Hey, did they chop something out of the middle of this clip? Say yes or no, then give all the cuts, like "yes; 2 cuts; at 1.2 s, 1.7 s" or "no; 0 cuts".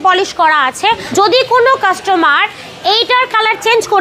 yes; 1 cut; at 1.0 s